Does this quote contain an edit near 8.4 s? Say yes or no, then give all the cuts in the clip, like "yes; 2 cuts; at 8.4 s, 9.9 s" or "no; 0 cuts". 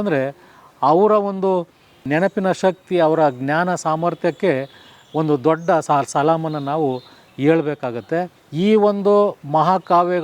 yes; 2 cuts; at 5.8 s, 8.4 s